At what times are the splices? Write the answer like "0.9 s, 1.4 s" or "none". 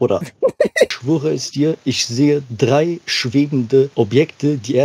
0.9 s, 3.9 s